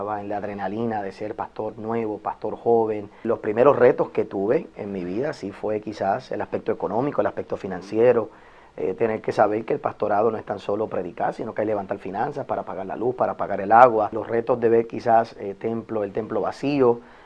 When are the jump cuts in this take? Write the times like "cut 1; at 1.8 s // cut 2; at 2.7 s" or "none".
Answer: cut 1; at 3.2 s // cut 2; at 14.2 s